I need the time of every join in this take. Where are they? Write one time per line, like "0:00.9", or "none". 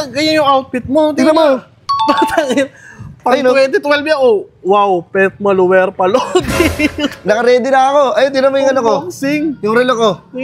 none